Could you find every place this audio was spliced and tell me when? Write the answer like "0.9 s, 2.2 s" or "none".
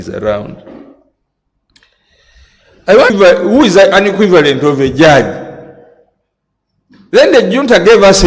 3.1 s